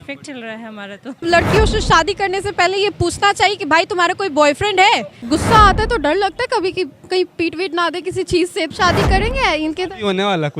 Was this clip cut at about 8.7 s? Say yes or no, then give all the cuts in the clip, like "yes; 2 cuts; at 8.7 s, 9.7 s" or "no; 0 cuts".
yes; 3 cuts; at 1.2 s, 5.2 s, 8.7 s